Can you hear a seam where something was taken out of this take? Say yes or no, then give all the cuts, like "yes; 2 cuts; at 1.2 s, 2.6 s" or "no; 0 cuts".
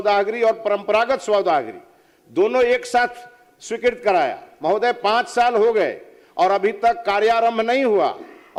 no; 0 cuts